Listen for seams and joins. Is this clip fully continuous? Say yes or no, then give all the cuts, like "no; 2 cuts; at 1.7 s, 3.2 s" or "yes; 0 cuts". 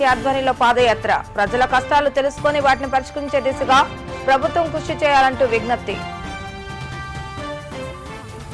yes; 0 cuts